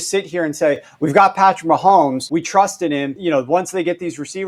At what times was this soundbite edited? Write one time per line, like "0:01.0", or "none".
0:02.2
0:03.1